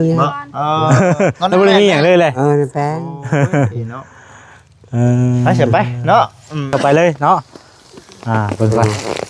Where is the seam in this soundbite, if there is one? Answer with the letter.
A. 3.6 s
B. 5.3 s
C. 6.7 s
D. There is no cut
C